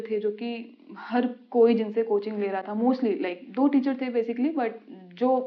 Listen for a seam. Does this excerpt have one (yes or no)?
no